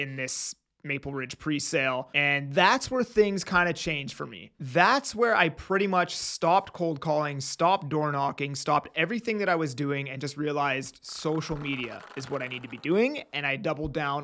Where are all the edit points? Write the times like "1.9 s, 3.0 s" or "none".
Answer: 2.1 s